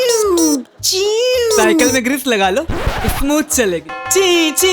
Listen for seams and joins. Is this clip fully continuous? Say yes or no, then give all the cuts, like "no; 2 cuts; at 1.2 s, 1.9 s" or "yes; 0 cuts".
yes; 0 cuts